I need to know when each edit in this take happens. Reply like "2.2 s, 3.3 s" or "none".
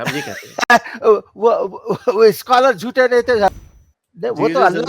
3.5 s